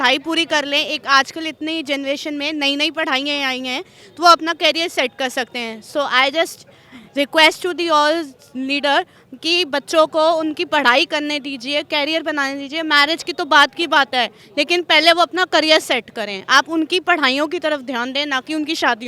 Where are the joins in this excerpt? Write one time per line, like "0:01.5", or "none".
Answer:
none